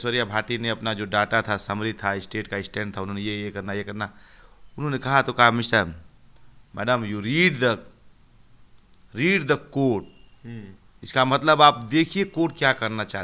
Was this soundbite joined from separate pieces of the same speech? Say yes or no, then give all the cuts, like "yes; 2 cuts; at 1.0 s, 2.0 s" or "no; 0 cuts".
no; 0 cuts